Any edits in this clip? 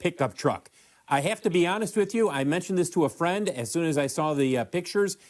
no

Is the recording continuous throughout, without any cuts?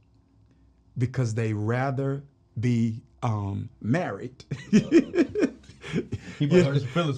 yes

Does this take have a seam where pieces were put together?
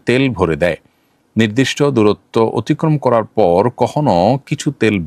no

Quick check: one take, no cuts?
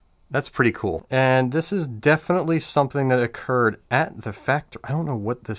no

